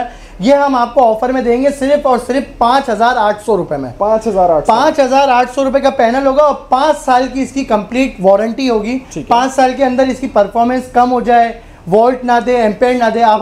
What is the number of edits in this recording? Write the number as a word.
zero